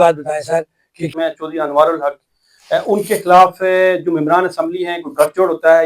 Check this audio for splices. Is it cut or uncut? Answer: cut